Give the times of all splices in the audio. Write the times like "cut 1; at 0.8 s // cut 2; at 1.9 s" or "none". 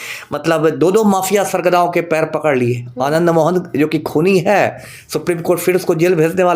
none